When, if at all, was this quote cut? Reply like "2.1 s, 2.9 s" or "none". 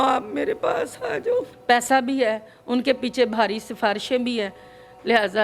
1.5 s